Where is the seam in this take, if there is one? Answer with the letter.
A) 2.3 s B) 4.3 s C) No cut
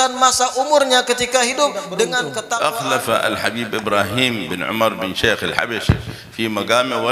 A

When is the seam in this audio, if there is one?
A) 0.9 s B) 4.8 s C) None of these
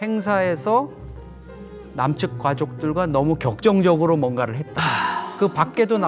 B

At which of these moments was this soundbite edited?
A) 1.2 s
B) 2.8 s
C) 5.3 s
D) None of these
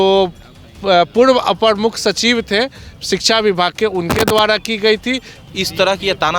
C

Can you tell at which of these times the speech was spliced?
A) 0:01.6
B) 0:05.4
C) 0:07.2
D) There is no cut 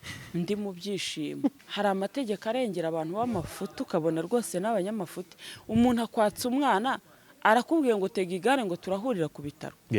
A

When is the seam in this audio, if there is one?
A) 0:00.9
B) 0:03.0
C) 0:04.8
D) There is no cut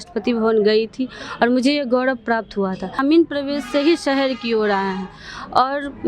B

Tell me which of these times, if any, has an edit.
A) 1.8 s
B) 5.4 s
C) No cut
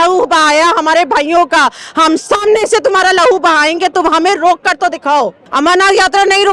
B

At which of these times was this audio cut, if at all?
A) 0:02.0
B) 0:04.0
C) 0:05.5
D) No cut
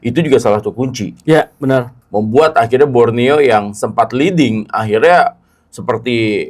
A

